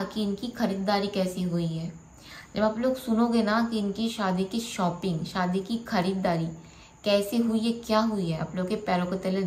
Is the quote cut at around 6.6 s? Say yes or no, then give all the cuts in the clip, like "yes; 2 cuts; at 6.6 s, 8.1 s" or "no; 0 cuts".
no; 0 cuts